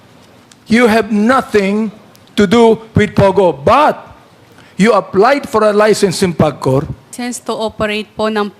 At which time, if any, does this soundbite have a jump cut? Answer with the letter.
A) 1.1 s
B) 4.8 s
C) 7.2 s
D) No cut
C